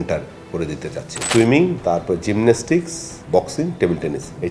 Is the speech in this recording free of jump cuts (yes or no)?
no